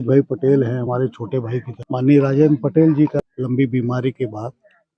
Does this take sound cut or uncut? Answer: cut